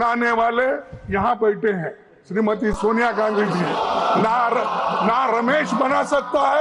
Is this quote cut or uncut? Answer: uncut